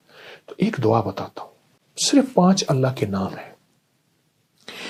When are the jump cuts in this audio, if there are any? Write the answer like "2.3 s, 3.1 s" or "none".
none

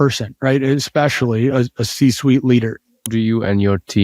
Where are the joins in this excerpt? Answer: 3.1 s

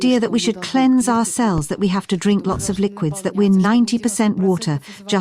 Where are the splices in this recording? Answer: none

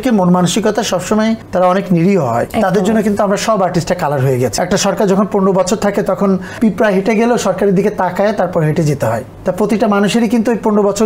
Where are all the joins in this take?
1.4 s, 2.5 s, 4.5 s, 6.6 s, 9.3 s

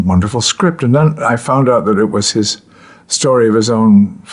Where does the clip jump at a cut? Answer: 1.6 s

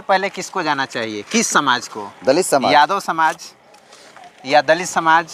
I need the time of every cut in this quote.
none

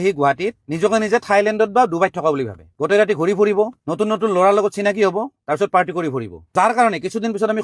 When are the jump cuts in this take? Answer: none

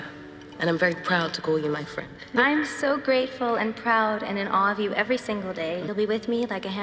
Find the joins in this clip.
2.2 s, 5.9 s

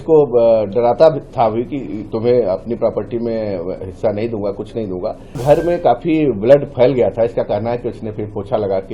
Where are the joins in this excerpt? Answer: 5.4 s

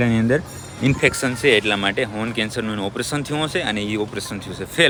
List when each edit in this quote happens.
none

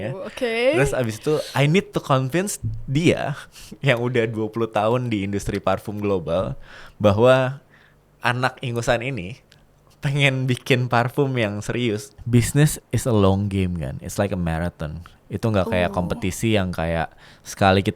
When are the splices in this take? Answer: 12.1 s

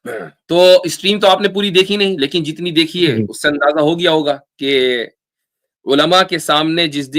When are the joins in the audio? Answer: none

